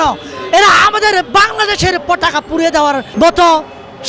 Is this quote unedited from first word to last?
no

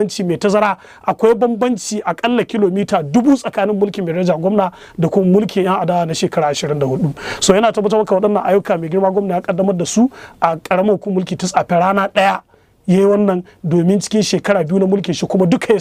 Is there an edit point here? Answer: no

